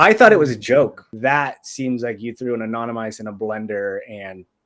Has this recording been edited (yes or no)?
yes